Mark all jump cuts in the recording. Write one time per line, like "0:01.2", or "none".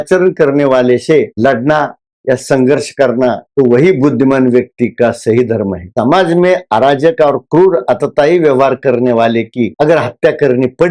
0:03.4
0:05.8